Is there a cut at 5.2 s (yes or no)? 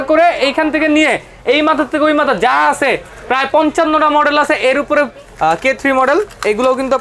yes